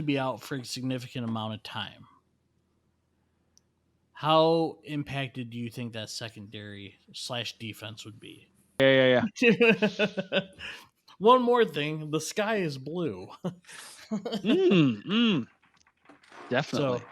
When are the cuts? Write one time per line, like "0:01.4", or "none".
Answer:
0:08.8